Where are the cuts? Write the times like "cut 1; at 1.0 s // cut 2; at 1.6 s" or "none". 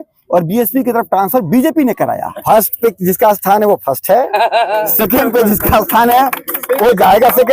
cut 1; at 2.3 s